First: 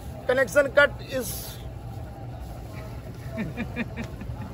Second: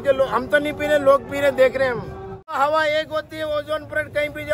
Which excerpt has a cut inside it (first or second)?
second